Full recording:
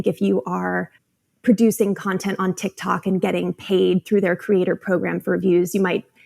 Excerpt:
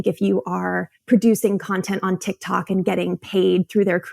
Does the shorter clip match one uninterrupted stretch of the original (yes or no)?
no